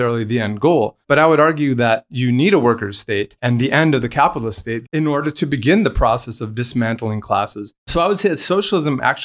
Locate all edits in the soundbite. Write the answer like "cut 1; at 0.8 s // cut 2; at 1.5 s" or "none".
cut 1; at 1.0 s // cut 2; at 3.3 s // cut 3; at 4.9 s // cut 4; at 7.9 s